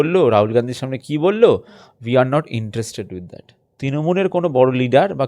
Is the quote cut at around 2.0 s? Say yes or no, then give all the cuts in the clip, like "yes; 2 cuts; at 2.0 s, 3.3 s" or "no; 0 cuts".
no; 1 cut; at 3.8 s